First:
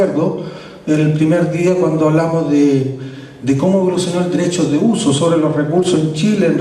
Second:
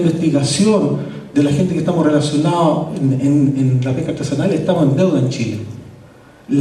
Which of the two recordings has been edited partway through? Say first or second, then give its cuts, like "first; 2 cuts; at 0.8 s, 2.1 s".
first; 1 cut; at 4.8 s